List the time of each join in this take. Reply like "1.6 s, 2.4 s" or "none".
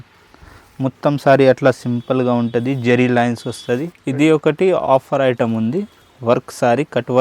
4.0 s